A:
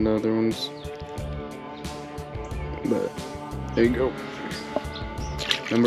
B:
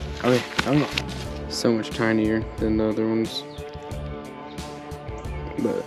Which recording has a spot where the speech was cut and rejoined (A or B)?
B